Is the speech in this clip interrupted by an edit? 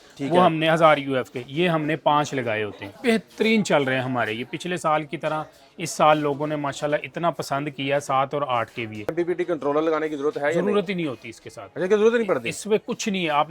yes; 2 cuts; at 2.9 s, 9.1 s

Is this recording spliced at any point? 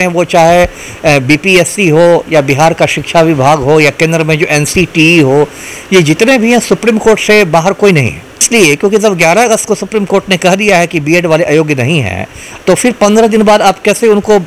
yes; 1 cut; at 8.5 s

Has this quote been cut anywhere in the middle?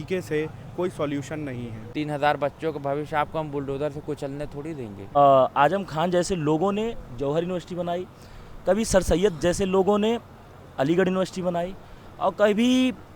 yes; 2 cuts; at 1.8 s, 5.2 s

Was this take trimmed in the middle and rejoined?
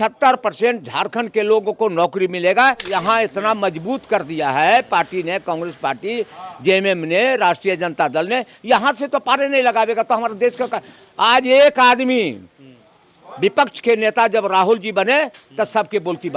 yes; 1 cut; at 2.9 s

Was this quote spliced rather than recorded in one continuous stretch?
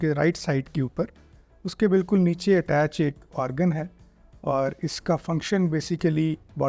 no; 0 cuts

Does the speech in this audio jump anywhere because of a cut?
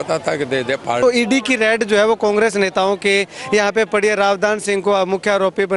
yes; 1 cut; at 1.0 s

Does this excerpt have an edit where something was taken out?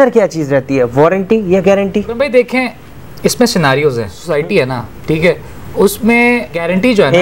yes; 1 cut; at 4.2 s

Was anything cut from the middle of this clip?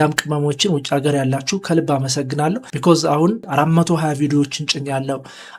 yes; 1 cut; at 3.5 s

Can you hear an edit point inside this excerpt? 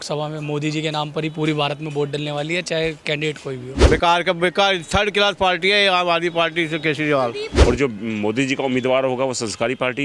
yes; 2 cuts; at 3.7 s, 7.5 s

